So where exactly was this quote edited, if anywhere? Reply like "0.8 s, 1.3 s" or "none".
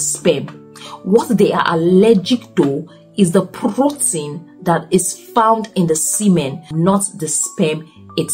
6.6 s